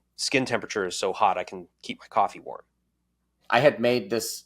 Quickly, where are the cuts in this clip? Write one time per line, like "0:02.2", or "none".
0:03.4